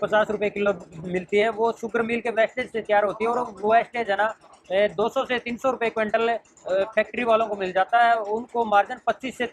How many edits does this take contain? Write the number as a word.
zero